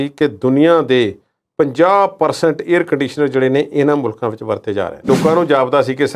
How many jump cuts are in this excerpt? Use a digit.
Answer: 1